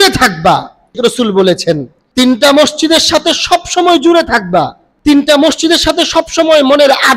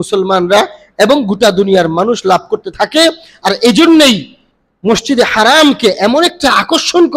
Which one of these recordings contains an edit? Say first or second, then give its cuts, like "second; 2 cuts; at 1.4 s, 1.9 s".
first; 3 cuts; at 1.0 s, 2.0 s, 4.8 s